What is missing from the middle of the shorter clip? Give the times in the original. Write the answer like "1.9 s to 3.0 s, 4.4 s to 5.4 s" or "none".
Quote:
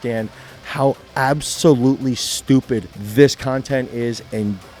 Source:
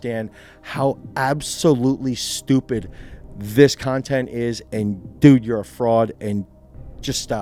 3.0 s to 3.4 s